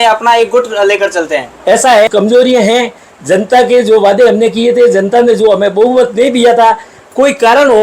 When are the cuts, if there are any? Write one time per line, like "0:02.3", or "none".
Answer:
0:02.1